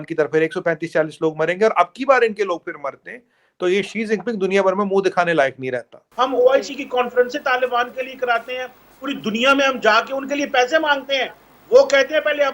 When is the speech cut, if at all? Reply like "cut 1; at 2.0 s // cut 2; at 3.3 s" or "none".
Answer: cut 1; at 6.0 s